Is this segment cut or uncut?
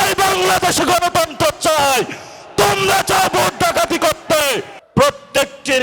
cut